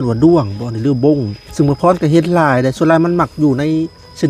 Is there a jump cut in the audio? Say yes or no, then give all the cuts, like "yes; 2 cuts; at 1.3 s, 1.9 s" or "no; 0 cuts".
yes; 1 cut; at 1.4 s